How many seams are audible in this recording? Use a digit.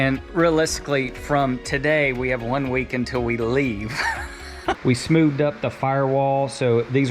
1